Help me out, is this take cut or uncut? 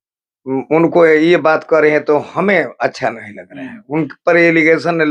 uncut